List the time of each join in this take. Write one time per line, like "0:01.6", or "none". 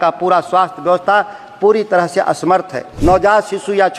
0:02.9